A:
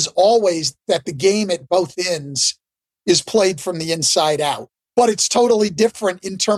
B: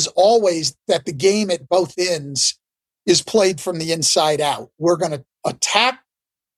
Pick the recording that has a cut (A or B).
A